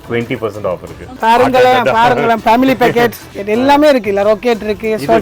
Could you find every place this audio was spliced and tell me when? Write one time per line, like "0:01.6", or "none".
0:01.1
0:03.3